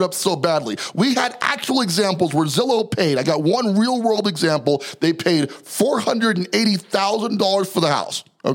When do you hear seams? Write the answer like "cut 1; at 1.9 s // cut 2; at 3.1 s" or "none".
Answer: none